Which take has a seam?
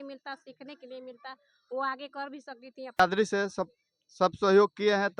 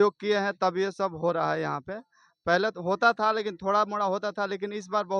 first; 1 cut; at 3.0 s

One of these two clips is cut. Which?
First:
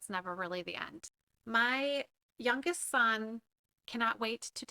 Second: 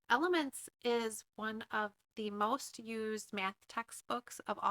first; 1 cut; at 1.0 s

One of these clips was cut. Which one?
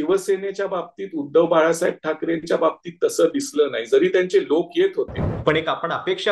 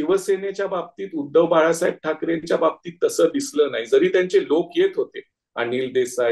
first; 1 cut; at 5.3 s

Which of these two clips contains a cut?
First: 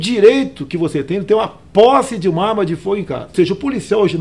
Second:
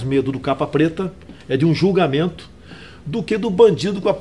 first; 1 cut; at 3.3 s

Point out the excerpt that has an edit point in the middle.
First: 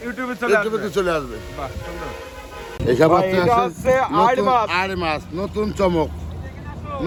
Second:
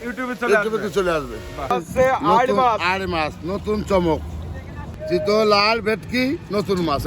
second; 2 cuts; at 1.7 s, 4.9 s

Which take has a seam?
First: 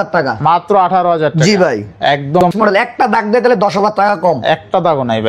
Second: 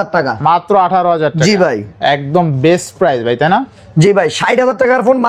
first; 1 cut; at 2.5 s

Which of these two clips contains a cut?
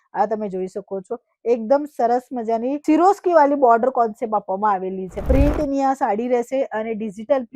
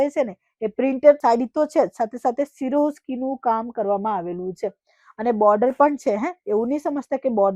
first; 1 cut; at 5.1 s

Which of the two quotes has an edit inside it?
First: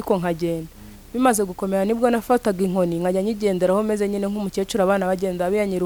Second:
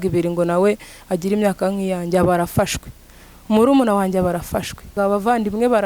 second; 1 cut; at 4.9 s

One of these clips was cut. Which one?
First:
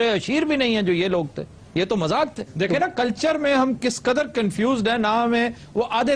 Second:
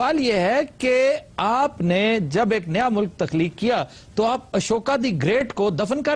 first; 1 cut; at 1.9 s

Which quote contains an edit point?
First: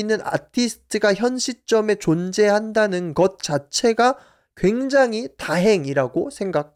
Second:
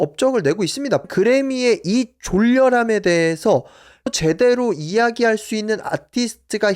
second; 2 cuts; at 1.0 s, 4.1 s

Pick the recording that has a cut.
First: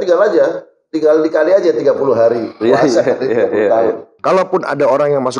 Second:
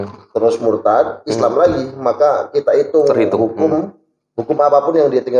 first; 1 cut; at 4.1 s

